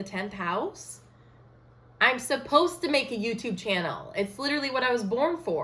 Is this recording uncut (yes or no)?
yes